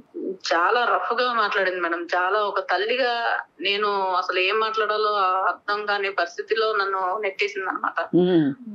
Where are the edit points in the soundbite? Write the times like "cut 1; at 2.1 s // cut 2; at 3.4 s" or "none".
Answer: none